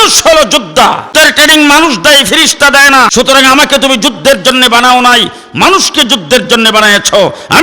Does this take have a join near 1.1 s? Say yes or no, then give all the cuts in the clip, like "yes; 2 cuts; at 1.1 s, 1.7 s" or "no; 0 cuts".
yes; 2 cuts; at 1.1 s, 3.1 s